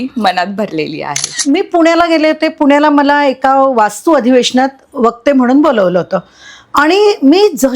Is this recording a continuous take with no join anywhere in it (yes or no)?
no